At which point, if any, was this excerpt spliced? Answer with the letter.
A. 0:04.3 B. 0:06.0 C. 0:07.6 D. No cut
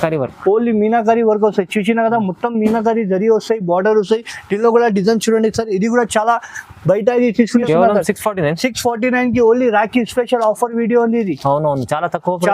C